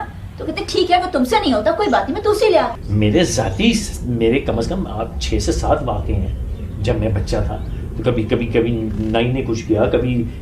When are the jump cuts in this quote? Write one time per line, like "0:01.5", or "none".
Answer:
0:02.8